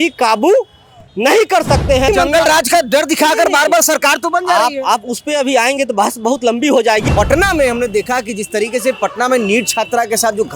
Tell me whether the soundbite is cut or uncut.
cut